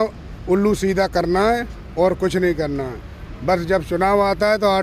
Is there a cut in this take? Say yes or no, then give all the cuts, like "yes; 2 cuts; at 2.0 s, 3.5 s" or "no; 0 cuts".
no; 0 cuts